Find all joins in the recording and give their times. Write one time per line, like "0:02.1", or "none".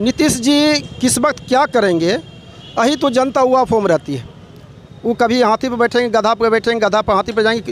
none

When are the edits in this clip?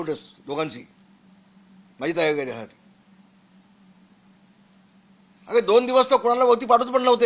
none

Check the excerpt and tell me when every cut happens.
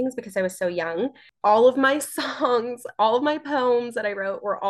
0:01.2

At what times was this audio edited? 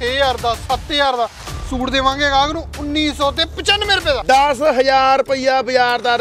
0:04.2

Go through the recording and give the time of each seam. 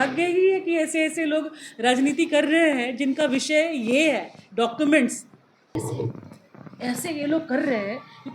0:05.8

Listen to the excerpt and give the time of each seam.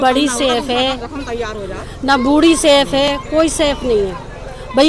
none

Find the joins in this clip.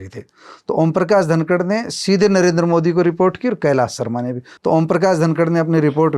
0:04.5

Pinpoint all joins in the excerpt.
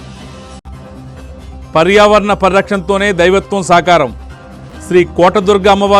0:01.1

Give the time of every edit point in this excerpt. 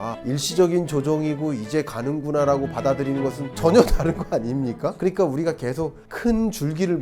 0:05.0
0:06.0

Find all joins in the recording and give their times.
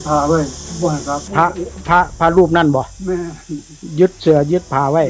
0:01.2

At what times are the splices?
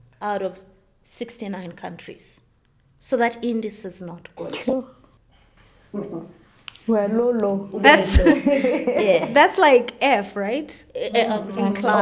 none

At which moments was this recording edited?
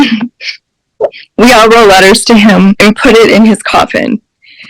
0:01.2
0:02.8

